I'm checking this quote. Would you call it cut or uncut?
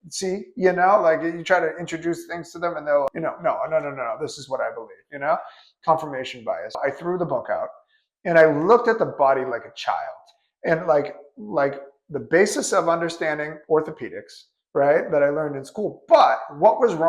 cut